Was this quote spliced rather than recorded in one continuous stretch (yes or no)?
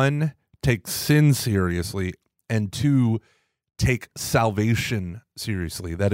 no